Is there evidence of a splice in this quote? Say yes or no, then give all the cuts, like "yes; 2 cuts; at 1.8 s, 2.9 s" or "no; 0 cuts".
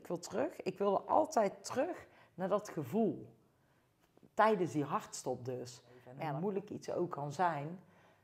yes; 1 cut; at 6.1 s